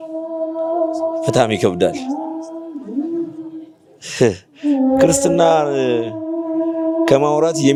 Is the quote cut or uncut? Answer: uncut